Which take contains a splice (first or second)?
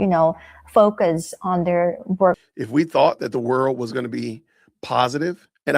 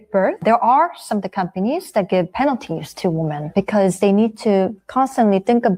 first